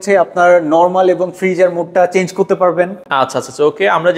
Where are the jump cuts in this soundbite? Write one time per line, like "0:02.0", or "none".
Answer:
none